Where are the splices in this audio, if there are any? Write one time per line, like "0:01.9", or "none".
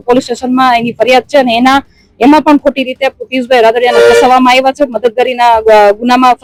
none